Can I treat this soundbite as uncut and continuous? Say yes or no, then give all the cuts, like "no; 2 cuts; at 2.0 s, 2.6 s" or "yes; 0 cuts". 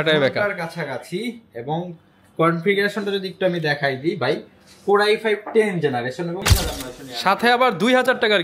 no; 1 cut; at 6.4 s